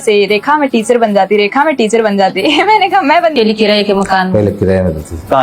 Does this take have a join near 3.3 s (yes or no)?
yes